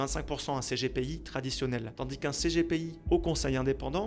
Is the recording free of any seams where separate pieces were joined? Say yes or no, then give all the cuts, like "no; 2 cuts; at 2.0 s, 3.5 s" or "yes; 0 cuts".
no; 2 cuts; at 1.9 s, 2.9 s